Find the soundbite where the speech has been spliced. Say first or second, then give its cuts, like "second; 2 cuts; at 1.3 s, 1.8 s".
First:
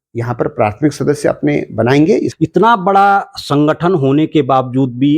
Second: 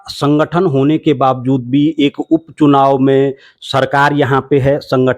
first; 1 cut; at 2.3 s